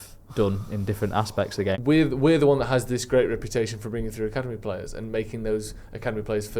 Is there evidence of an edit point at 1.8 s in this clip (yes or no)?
yes